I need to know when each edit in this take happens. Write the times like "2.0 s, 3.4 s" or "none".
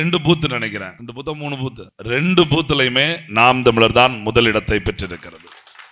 1.0 s, 1.9 s